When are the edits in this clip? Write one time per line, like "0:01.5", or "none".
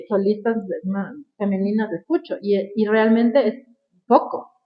none